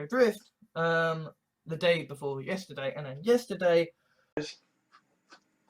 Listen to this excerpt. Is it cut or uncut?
cut